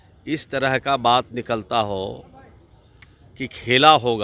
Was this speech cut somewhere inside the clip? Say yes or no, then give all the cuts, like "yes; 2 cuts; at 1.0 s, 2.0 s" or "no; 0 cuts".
no; 0 cuts